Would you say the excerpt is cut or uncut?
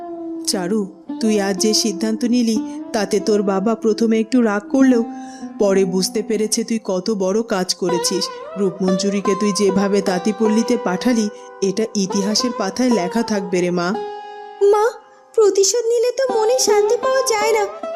uncut